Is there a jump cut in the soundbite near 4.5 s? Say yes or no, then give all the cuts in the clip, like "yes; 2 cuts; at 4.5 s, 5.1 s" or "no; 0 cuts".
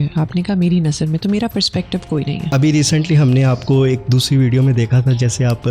no; 1 cut; at 2.5 s